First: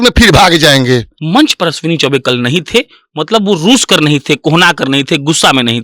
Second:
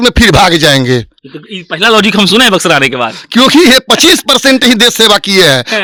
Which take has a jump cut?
first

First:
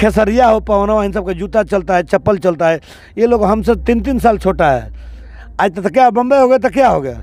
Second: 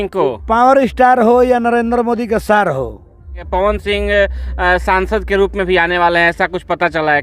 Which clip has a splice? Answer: second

